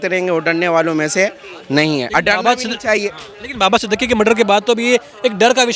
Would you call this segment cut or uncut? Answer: uncut